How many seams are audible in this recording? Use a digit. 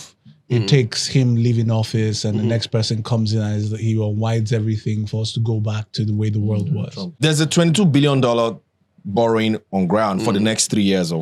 1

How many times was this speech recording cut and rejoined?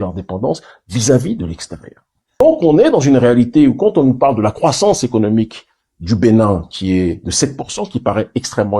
1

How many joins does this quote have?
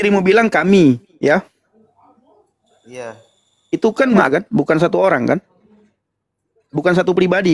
1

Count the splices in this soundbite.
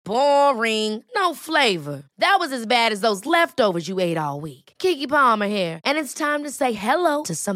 0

